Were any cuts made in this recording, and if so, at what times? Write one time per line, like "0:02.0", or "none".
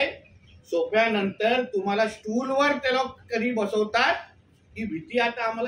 none